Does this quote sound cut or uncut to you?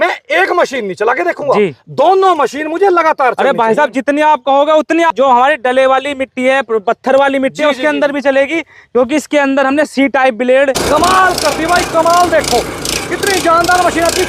cut